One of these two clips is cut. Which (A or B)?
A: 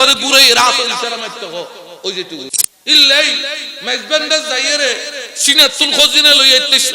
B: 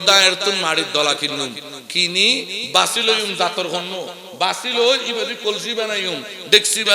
A